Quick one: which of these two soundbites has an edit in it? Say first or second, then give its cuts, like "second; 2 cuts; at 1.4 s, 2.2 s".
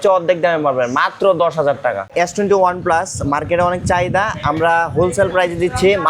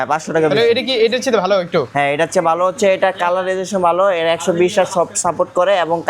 first; 1 cut; at 2.0 s